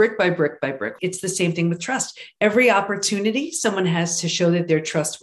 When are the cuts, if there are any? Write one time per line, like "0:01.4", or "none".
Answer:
0:00.9